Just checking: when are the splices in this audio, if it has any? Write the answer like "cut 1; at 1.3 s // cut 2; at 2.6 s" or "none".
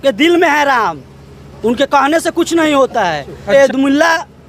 cut 1; at 3.5 s